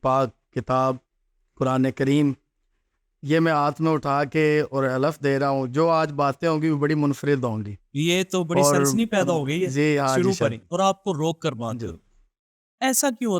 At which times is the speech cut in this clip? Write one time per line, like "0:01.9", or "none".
0:10.7